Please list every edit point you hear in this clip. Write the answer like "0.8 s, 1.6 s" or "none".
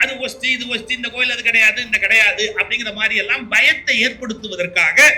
none